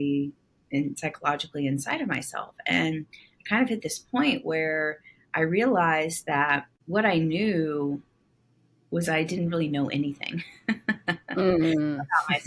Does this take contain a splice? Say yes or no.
yes